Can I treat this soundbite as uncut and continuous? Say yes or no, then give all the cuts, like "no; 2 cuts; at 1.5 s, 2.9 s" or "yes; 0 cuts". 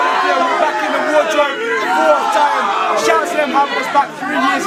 yes; 0 cuts